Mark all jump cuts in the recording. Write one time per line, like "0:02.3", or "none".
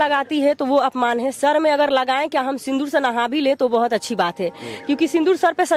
none